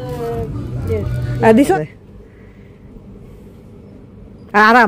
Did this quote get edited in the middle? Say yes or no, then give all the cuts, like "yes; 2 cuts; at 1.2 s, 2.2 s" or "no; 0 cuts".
yes; 1 cut; at 1.7 s